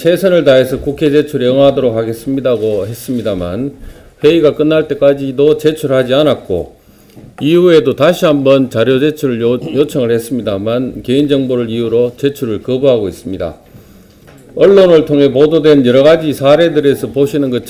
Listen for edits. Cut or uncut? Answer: uncut